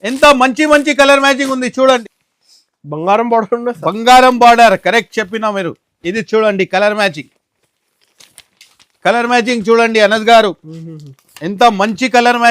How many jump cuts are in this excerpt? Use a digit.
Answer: 1